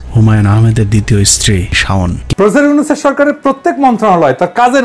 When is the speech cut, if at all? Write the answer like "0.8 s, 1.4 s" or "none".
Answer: 2.2 s